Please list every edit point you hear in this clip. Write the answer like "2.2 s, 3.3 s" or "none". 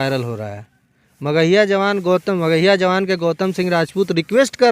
none